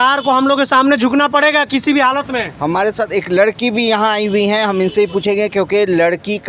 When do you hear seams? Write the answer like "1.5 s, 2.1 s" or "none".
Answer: none